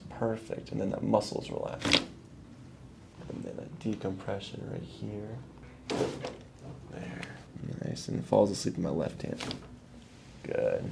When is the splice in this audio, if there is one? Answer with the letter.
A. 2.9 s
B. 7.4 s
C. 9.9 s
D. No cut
D